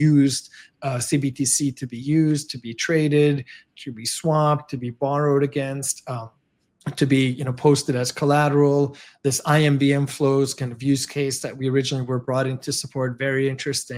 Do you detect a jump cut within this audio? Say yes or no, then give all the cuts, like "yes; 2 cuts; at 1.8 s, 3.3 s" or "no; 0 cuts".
no; 0 cuts